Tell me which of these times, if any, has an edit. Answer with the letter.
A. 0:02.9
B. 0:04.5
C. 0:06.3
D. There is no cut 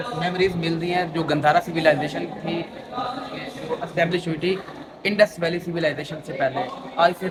D